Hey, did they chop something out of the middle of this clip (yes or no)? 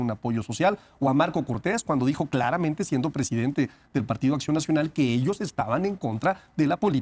no